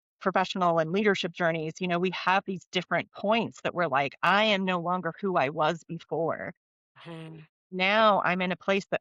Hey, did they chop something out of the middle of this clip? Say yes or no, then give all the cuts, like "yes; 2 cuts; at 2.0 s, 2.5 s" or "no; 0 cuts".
no; 0 cuts